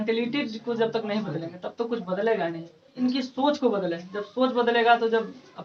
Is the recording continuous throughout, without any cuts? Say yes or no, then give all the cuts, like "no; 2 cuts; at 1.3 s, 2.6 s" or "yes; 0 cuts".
no; 1 cut; at 2.9 s